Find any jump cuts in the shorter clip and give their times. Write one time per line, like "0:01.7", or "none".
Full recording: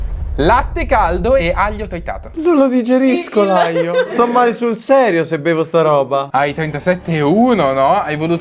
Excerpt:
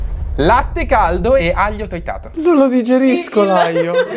none